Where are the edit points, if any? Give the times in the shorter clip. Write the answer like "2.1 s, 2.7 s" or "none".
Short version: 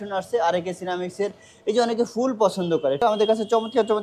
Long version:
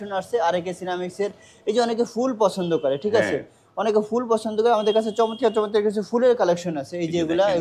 3.0 s